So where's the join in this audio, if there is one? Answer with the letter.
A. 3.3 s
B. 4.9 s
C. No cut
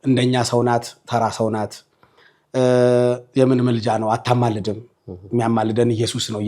C